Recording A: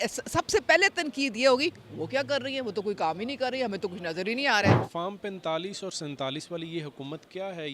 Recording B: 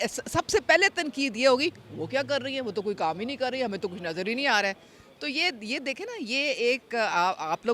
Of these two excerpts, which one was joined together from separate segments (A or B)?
A